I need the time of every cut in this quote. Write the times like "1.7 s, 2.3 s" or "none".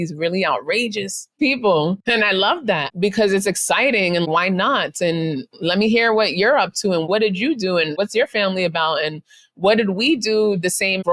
2.0 s